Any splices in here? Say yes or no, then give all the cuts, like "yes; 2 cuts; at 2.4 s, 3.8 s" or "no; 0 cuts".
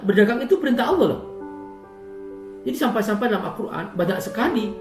no; 0 cuts